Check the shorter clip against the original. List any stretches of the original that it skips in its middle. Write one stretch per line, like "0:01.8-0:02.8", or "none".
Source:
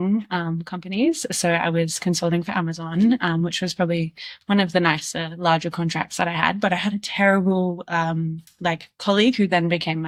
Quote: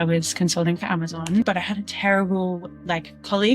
0:03.1-0:06.6
0:07.8-0:08.4